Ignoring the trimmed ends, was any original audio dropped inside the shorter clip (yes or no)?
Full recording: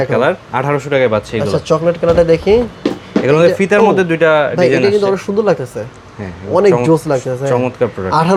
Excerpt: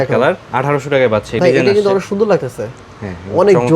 yes